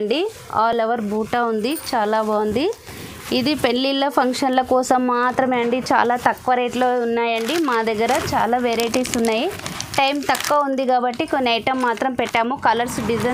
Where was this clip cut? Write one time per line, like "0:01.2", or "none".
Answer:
none